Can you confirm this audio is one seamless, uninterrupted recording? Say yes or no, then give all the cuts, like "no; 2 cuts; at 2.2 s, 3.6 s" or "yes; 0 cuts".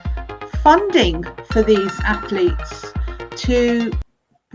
yes; 0 cuts